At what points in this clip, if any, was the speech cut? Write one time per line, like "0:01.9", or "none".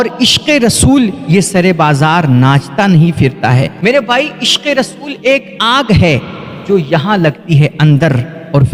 none